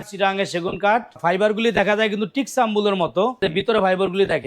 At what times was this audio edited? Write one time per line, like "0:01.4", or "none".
0:01.2
0:03.4